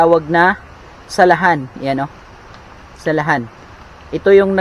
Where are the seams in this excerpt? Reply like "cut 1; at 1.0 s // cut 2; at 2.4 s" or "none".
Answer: none